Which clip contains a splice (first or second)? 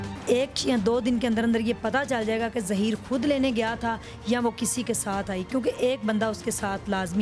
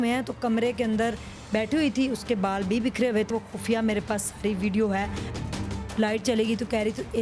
second